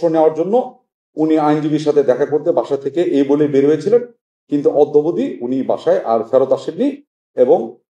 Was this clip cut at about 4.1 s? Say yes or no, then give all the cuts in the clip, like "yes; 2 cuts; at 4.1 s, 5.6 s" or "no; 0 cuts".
no; 0 cuts